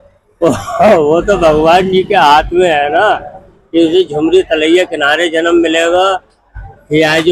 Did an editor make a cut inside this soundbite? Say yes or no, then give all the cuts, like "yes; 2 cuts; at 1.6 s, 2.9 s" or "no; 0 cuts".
no; 0 cuts